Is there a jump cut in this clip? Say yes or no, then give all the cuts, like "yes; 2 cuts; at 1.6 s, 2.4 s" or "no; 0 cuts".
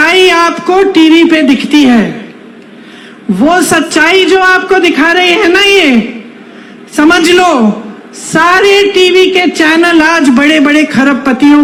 no; 0 cuts